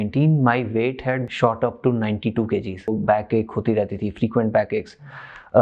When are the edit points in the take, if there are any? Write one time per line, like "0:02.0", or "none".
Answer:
0:02.9